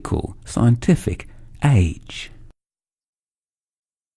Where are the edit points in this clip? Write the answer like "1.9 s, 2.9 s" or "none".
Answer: 1.0 s